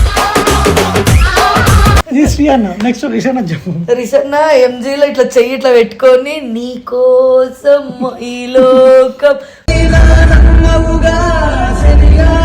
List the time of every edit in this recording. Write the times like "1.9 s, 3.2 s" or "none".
2.0 s